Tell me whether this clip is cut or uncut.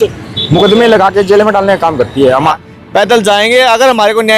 cut